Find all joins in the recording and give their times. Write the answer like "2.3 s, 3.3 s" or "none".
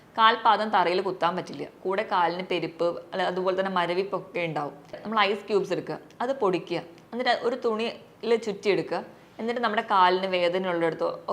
5.0 s